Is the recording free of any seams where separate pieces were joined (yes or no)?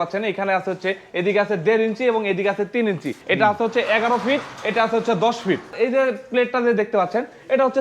no